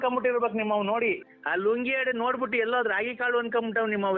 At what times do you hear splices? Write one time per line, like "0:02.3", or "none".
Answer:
0:01.3